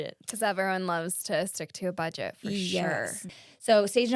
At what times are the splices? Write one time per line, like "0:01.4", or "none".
0:03.2